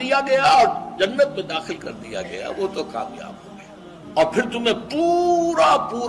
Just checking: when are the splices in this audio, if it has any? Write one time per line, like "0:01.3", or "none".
0:04.0